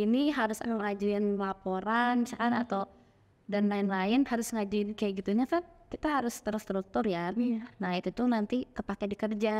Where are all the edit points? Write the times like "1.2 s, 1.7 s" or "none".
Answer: none